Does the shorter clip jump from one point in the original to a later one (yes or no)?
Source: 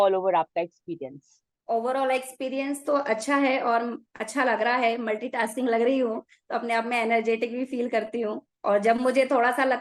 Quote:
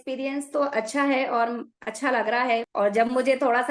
yes